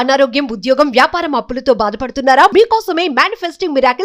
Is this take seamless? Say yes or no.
yes